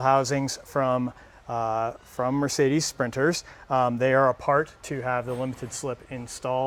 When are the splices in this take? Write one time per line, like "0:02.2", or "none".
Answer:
none